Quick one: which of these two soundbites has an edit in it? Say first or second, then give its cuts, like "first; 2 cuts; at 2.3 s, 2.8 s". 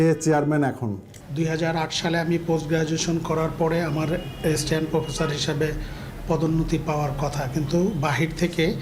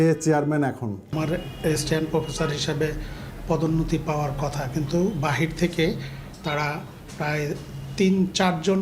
second; 1 cut; at 1.1 s